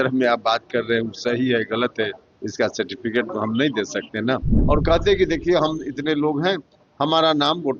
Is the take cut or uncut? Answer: cut